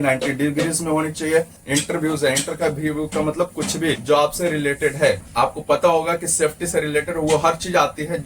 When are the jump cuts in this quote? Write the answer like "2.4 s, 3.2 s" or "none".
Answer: 1.6 s, 4.0 s, 5.3 s